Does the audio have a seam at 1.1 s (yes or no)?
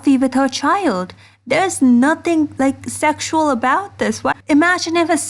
no